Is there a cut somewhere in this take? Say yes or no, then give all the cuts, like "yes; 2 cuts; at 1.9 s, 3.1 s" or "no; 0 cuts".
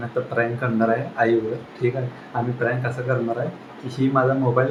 no; 0 cuts